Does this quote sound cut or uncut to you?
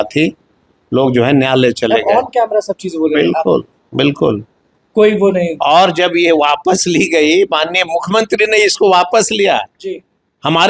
uncut